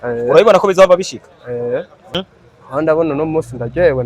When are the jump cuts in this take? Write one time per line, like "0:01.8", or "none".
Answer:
0:02.0